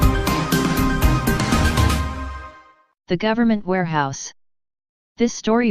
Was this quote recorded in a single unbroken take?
yes; 0 cuts

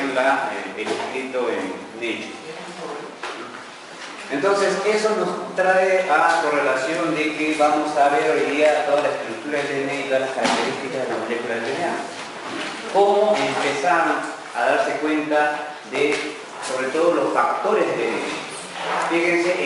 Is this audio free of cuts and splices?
yes; 0 cuts

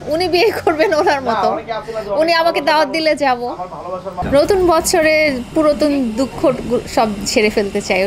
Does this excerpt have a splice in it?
yes; 1 cut; at 4.2 s

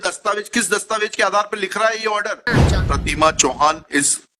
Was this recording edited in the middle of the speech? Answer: yes; 1 cut; at 2.6 s

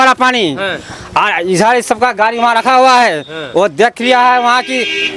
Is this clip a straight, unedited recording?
yes; 0 cuts

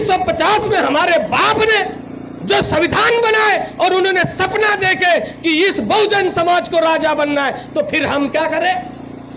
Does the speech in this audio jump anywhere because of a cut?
no; 0 cuts

